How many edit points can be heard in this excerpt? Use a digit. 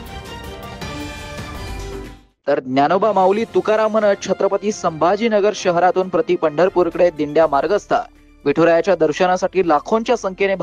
1